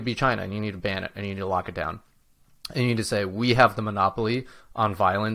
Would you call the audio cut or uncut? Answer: uncut